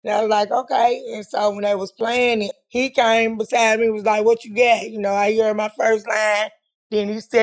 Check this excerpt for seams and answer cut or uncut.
cut